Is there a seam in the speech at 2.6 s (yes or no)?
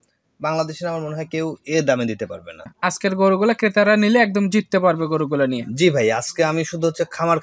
yes